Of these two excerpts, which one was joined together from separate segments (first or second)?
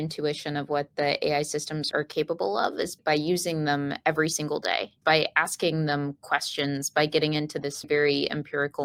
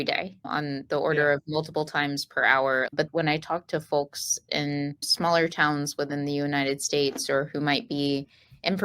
second